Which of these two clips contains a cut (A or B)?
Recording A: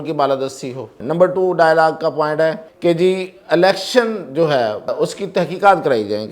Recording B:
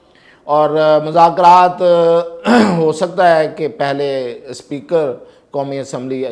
A